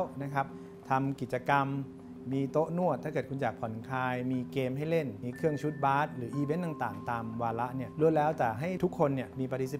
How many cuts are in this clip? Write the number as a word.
three